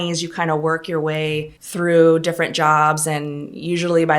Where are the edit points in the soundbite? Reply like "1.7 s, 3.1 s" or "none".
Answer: 1.6 s